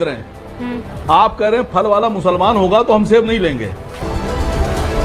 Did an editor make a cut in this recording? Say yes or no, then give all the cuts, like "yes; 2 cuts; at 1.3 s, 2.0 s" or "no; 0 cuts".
yes; 1 cut; at 4.0 s